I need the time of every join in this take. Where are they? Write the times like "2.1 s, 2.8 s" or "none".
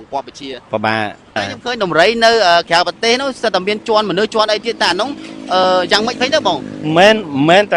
1.4 s